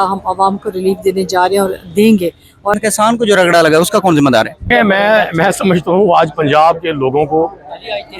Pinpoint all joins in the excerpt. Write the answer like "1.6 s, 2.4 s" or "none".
2.7 s, 4.7 s